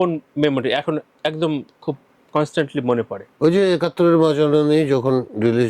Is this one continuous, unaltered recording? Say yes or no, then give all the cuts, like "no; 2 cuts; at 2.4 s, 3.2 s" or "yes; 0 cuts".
no; 1 cut; at 2.1 s